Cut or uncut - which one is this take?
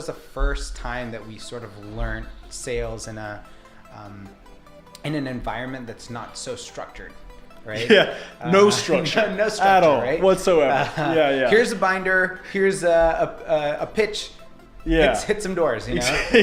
uncut